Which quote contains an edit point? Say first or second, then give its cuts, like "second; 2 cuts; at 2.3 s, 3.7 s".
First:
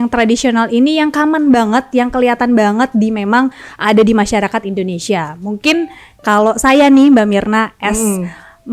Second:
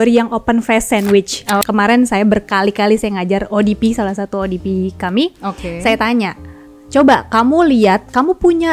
second; 1 cut; at 1.6 s